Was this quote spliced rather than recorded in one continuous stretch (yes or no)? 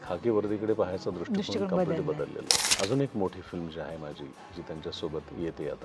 yes